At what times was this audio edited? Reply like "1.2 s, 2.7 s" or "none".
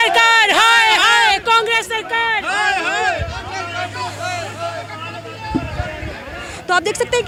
none

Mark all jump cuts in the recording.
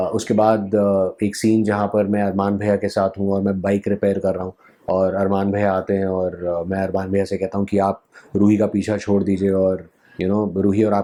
none

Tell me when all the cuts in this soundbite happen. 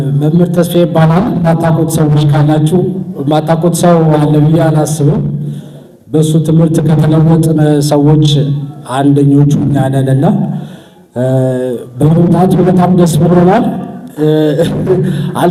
none

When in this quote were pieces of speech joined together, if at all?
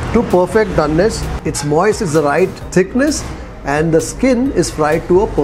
2.6 s

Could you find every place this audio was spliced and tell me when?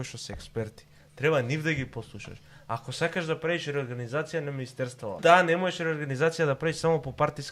5.2 s

